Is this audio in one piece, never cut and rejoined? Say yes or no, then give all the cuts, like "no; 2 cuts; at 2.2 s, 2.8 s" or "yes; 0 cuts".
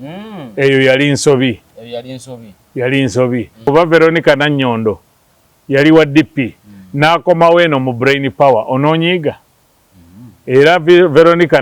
no; 1 cut; at 3.6 s